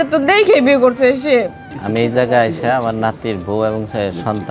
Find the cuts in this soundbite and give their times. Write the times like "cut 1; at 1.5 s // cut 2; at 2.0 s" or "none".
cut 1; at 1.7 s